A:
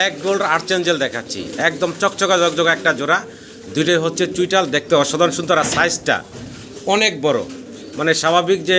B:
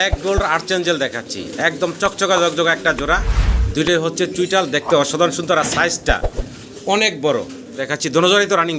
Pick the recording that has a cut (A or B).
B